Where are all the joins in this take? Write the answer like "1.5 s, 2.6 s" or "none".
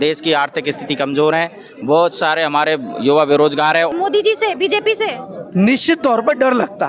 3.9 s